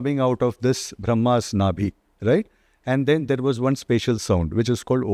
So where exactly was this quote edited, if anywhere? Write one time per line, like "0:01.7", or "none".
none